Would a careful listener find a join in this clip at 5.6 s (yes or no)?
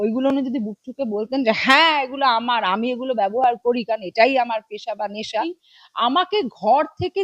yes